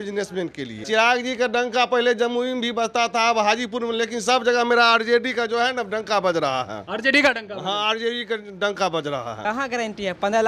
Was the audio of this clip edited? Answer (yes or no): yes